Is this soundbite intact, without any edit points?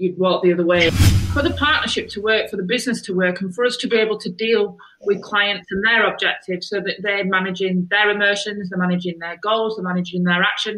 no; 1 cut; at 0.9 s

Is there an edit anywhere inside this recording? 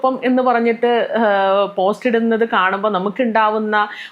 no; 0 cuts

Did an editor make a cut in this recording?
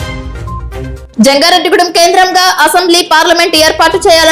yes; 1 cut; at 1.0 s

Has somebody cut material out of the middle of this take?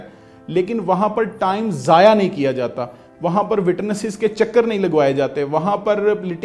no; 0 cuts

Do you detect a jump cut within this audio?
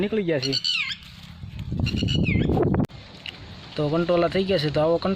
yes; 1 cut; at 3.1 s

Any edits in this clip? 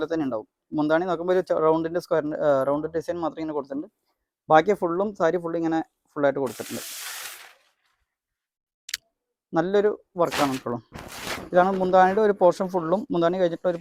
no; 0 cuts

